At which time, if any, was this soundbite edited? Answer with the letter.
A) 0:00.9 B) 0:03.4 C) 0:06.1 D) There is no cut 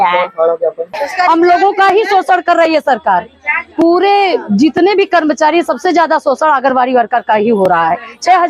A